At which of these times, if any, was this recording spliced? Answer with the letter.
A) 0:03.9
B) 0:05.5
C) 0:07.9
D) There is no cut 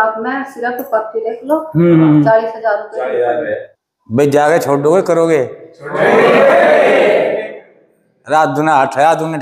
A